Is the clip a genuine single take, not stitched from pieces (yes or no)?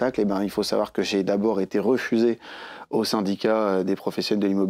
yes